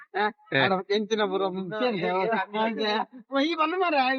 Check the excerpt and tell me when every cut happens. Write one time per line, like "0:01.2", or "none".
none